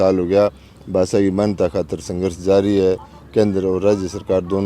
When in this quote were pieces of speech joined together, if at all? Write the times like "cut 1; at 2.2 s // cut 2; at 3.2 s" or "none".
none